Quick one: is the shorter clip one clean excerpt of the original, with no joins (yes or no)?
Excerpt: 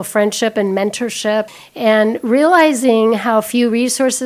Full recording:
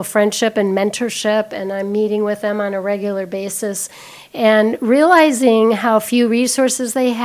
no